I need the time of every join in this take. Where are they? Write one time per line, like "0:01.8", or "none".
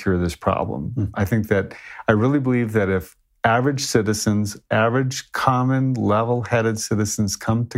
none